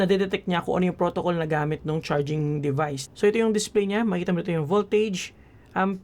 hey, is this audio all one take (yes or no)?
no